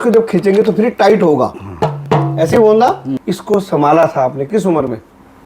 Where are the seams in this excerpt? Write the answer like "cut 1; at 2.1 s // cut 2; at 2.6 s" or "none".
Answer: cut 1; at 3.2 s